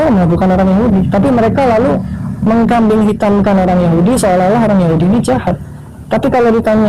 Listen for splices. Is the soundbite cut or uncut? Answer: uncut